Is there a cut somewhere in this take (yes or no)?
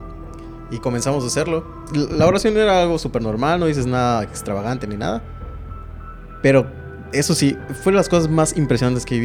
no